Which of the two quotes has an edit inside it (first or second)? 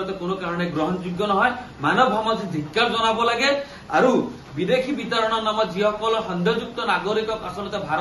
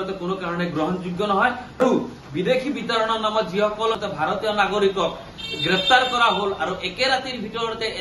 second